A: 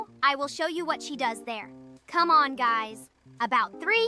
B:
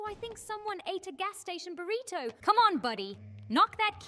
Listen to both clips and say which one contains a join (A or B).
B